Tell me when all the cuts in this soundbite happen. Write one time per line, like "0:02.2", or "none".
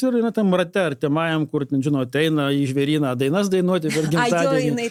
none